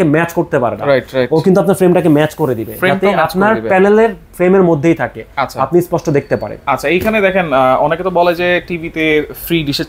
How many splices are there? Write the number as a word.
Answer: zero